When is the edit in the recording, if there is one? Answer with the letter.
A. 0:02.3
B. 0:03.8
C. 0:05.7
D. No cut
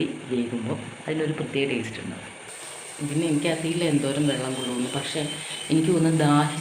A